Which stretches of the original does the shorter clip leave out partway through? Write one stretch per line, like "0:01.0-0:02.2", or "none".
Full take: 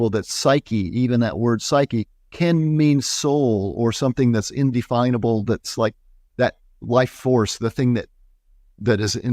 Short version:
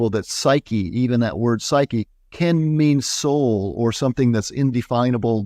none